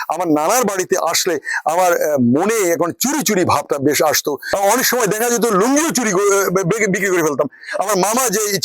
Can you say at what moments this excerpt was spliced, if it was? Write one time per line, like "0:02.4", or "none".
0:04.4